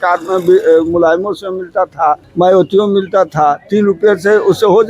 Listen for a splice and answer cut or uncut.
cut